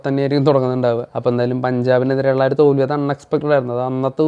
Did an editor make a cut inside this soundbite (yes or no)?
yes